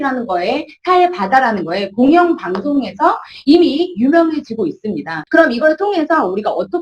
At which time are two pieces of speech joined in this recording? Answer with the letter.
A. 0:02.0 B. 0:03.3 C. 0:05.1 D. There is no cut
C